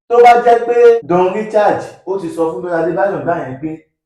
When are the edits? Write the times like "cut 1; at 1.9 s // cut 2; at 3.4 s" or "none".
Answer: cut 1; at 1.0 s